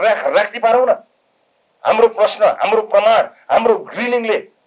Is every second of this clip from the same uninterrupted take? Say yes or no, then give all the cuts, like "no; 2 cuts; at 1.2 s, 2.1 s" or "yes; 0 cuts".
yes; 0 cuts